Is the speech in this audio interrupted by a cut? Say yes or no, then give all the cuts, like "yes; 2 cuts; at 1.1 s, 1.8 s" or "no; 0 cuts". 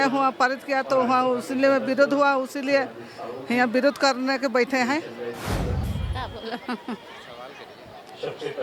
yes; 1 cut; at 5.8 s